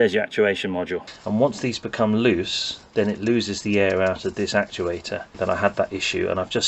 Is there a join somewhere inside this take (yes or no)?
yes